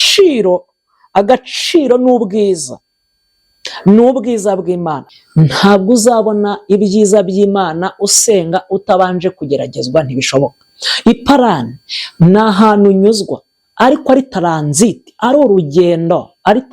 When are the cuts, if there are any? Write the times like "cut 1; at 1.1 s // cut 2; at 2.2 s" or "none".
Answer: cut 1; at 5.0 s